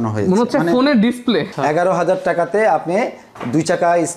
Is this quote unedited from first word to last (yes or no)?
no